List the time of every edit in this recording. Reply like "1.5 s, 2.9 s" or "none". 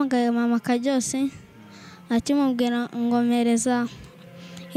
none